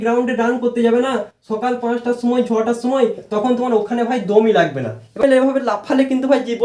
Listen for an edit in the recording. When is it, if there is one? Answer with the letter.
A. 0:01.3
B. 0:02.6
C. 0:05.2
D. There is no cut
C